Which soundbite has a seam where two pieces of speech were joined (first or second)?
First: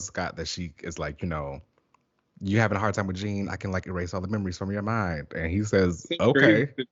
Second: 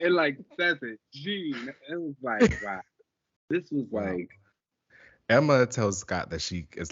second